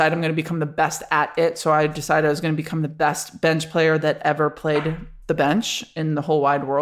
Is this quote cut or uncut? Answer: uncut